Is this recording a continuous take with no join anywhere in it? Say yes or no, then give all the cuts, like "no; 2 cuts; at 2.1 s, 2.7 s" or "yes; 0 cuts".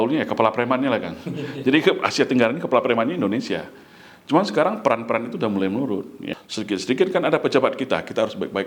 no; 1 cut; at 6.3 s